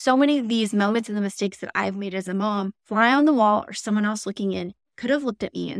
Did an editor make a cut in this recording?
yes; 1 cut; at 2.8 s

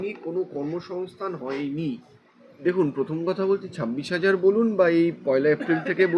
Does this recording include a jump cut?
no; 0 cuts

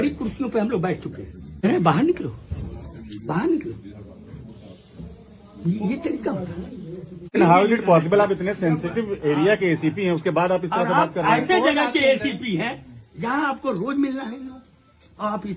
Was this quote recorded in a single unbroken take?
no; 2 cuts; at 1.6 s, 7.3 s

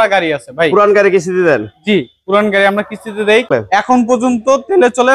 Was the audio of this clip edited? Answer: yes; 1 cut; at 3.5 s

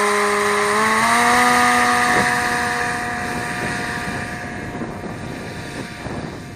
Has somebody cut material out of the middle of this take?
no; 0 cuts

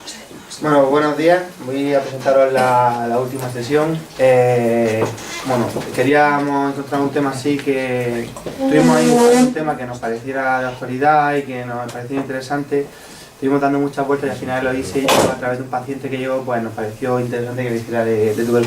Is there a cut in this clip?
yes; 1 cut; at 5.7 s

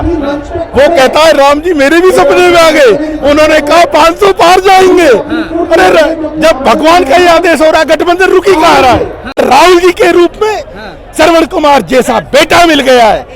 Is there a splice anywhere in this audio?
yes; 1 cut; at 9.4 s

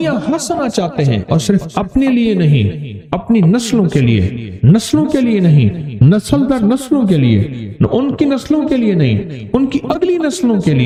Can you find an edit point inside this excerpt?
no; 0 cuts

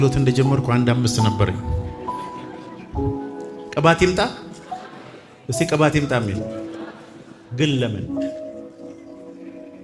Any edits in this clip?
no; 0 cuts

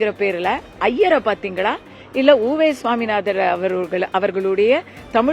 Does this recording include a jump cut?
no; 0 cuts

